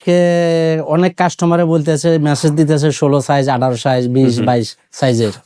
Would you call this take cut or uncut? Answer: uncut